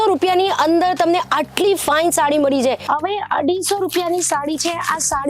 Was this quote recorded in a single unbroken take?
no; 1 cut; at 2.8 s

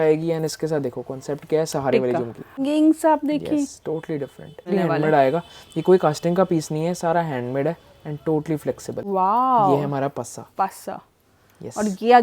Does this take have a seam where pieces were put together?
yes; 3 cuts; at 2.6 s, 4.7 s, 9.0 s

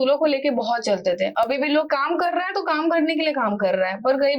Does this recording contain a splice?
yes; 1 cut; at 1.9 s

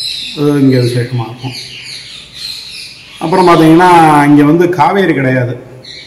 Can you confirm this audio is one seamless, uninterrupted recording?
yes; 0 cuts

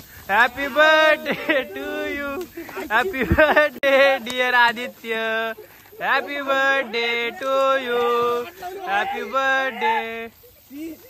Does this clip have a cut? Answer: no; 0 cuts

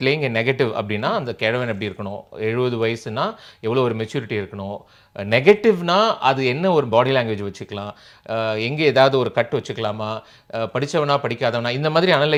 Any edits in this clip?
no; 0 cuts

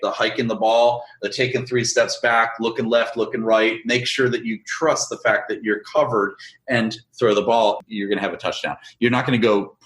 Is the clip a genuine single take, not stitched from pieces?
yes; 0 cuts

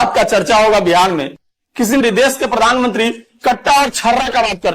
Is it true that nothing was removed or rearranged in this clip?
no; 1 cut; at 2.0 s

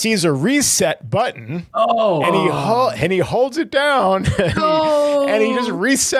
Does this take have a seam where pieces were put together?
no; 0 cuts

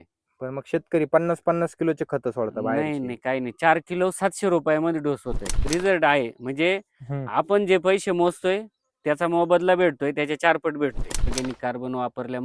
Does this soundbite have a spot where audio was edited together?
yes; 2 cuts; at 5.6 s, 11.3 s

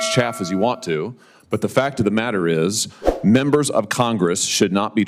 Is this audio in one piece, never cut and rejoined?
yes; 0 cuts

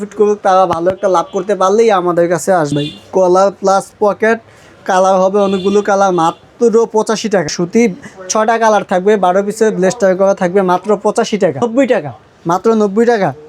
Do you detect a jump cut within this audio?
yes; 3 cuts; at 2.7 s, 7.5 s, 11.6 s

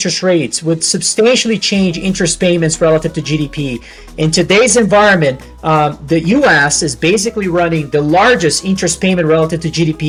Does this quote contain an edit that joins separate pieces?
no; 0 cuts

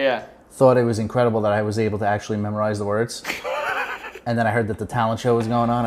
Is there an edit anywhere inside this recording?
no; 0 cuts

